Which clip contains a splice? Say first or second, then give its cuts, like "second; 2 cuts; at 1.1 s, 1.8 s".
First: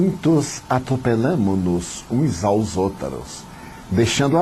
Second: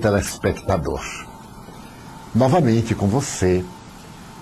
first; 1 cut; at 1.3 s